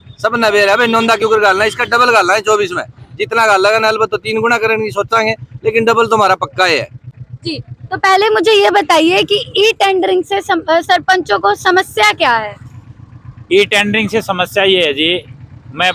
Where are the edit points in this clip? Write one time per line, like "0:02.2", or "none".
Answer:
none